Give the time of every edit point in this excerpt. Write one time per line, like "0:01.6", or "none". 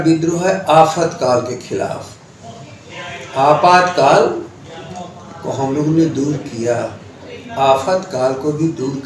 none

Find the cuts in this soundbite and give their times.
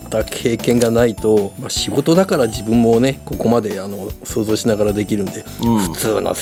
none

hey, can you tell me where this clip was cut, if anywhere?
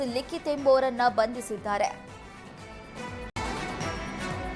0:03.4

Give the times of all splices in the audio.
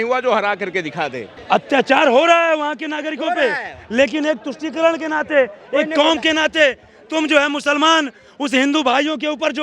0:01.3

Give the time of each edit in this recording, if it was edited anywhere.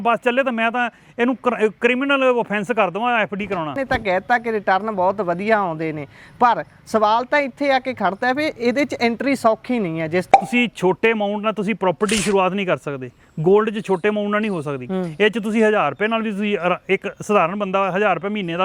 0:03.8
0:10.3

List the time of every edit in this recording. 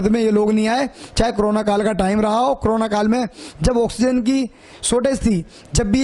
none

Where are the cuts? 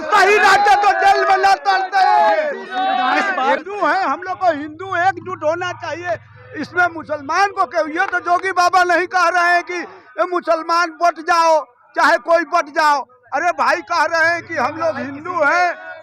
0:03.6

